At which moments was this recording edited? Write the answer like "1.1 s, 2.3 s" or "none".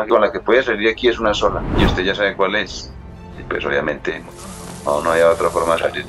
none